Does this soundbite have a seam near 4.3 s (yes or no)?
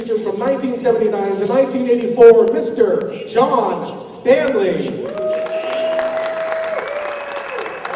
no